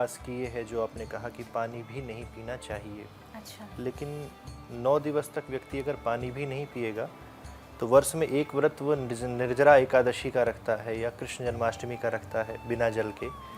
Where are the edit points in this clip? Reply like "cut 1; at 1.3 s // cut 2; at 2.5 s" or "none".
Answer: none